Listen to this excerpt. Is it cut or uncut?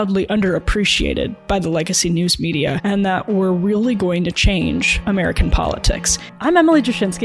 uncut